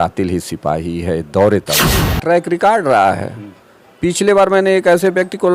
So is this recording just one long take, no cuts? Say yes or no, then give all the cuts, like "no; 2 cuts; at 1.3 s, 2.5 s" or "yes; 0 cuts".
no; 1 cut; at 2.1 s